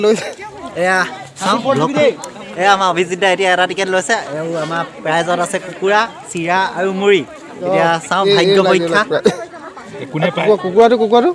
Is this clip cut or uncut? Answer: uncut